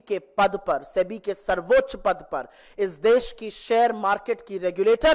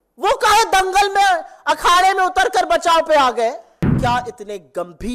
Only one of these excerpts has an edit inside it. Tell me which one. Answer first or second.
second